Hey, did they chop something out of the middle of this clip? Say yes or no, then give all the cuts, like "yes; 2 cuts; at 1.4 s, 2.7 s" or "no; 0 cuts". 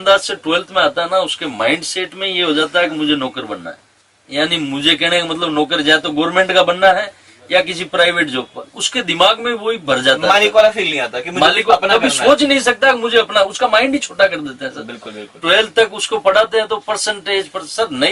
no; 0 cuts